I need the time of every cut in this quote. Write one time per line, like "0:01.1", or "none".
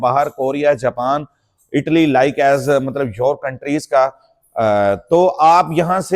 none